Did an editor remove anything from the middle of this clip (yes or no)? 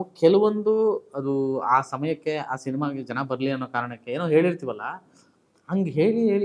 no